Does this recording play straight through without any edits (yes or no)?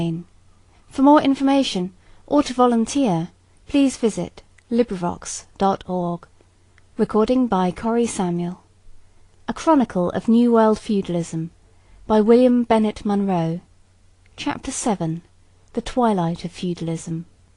no